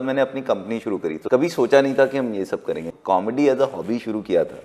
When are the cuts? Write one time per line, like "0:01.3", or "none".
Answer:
0:01.2
0:02.9